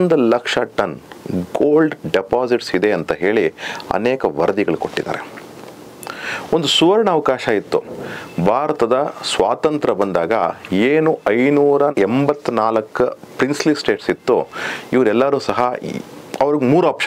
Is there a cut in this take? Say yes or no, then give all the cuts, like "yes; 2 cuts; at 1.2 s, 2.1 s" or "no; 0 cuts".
no; 0 cuts